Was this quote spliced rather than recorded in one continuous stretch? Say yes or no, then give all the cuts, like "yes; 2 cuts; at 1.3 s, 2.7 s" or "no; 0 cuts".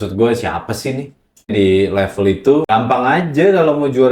yes; 2 cuts; at 1.4 s, 2.7 s